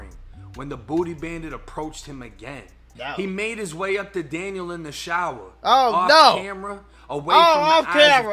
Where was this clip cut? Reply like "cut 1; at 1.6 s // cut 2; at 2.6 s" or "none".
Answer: cut 1; at 2.9 s